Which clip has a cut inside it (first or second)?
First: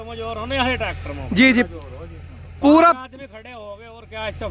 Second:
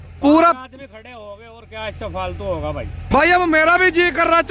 second